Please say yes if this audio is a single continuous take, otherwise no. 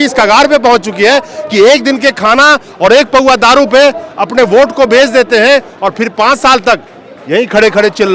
yes